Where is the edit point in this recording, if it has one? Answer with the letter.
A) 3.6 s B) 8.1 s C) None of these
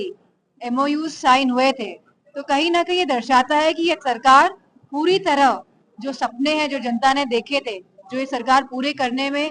C